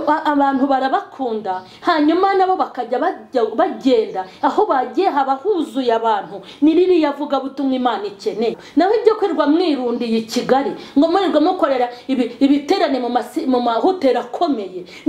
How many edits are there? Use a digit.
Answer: 1